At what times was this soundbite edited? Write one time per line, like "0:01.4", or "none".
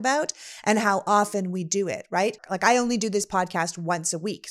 0:02.5